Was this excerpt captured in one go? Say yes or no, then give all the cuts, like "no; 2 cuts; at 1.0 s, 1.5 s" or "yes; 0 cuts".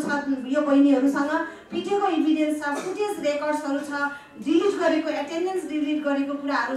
yes; 0 cuts